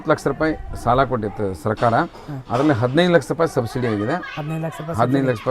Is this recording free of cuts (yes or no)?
yes